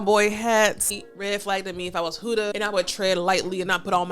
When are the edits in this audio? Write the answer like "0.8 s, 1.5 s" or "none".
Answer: 1.0 s, 2.5 s